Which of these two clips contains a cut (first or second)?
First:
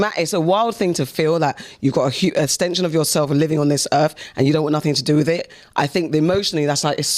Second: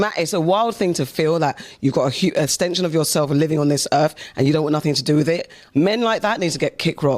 second